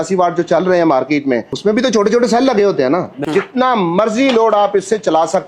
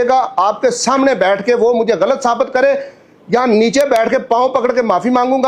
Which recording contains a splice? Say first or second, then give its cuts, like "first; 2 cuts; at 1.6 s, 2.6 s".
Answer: first; 2 cuts; at 1.5 s, 3.2 s